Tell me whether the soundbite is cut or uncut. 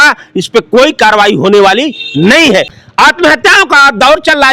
cut